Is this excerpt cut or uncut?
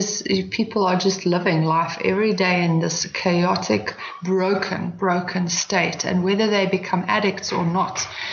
uncut